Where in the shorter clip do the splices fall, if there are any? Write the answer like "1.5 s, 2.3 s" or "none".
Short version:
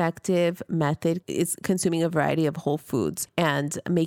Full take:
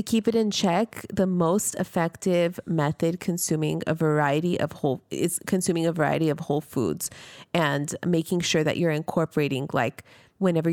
1.2 s, 3.2 s